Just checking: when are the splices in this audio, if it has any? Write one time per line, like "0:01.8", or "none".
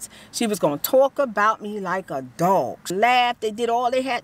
0:02.9

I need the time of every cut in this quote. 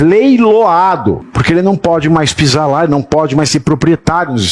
0:01.3

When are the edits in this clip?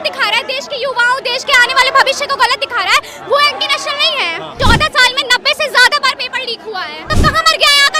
0:04.6
0:07.0

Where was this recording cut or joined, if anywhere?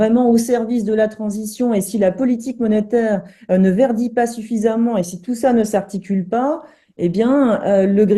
none

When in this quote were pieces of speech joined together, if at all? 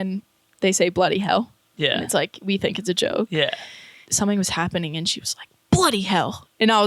0:04.0

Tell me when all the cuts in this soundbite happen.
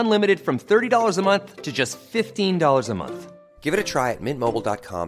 none

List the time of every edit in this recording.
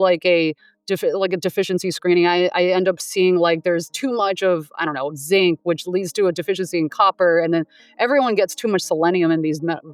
none

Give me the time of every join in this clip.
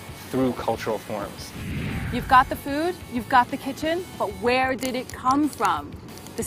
0:01.7

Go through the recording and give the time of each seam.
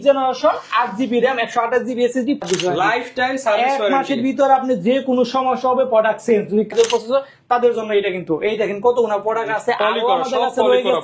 0:02.4
0:06.7

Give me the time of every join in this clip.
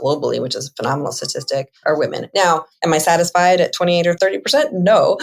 0:01.7
0:02.7
0:04.2

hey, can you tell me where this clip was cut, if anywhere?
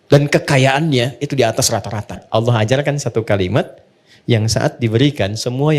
0:02.2

